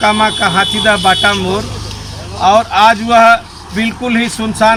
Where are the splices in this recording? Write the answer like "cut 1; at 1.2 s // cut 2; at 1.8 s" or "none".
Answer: none